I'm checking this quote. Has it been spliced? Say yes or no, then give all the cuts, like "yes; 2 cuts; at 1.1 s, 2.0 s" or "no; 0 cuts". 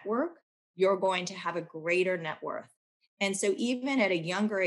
no; 0 cuts